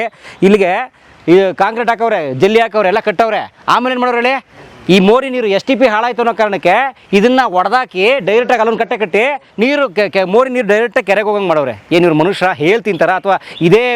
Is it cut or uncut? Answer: uncut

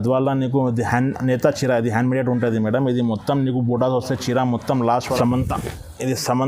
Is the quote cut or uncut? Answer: cut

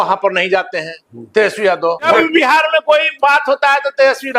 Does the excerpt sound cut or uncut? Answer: cut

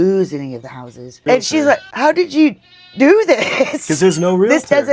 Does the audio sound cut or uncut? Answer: cut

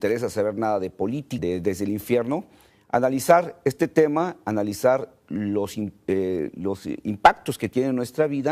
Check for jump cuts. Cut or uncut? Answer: uncut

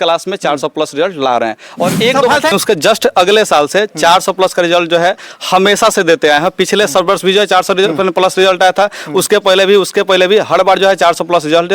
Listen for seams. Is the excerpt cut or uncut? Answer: cut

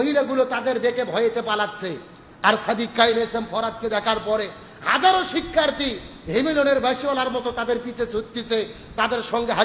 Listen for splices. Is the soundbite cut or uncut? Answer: uncut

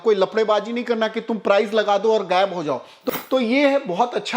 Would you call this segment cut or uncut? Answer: cut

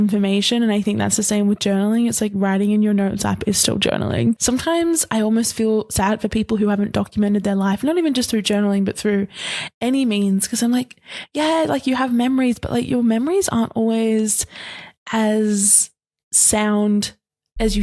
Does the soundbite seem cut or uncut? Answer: cut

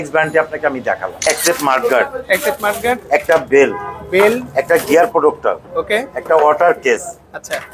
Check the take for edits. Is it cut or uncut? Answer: cut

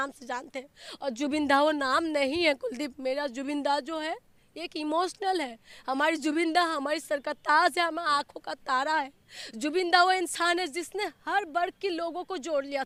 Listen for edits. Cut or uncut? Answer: uncut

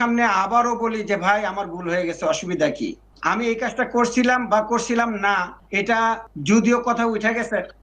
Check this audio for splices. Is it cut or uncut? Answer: cut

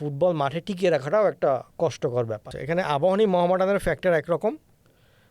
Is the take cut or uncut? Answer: cut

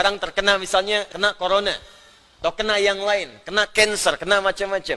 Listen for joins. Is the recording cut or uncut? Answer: cut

